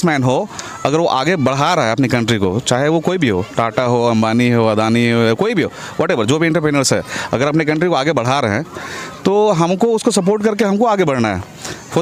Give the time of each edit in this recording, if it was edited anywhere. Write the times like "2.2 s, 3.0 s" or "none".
none